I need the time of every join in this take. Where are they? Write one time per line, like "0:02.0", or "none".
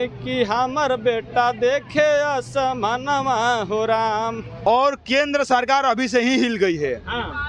0:04.5